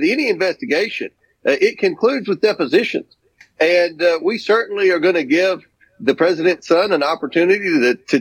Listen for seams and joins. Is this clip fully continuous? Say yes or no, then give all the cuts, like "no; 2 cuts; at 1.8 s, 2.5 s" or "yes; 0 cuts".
yes; 0 cuts